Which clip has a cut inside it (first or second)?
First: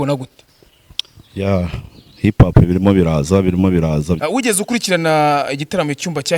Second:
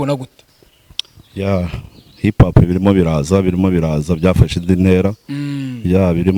first